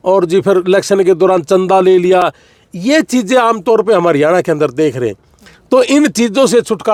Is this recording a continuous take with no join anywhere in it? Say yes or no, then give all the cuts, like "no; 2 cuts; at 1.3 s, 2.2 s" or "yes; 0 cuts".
yes; 0 cuts